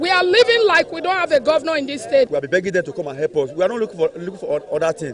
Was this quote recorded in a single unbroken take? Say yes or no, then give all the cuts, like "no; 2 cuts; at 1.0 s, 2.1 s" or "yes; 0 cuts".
no; 1 cut; at 2.3 s